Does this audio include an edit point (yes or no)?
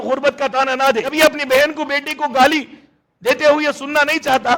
yes